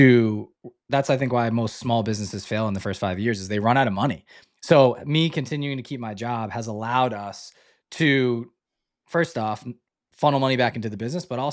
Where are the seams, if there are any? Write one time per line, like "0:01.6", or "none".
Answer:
none